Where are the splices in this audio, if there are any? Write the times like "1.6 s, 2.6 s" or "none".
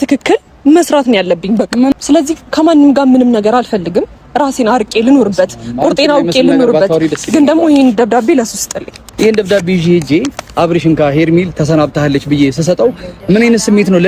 1.9 s, 9.0 s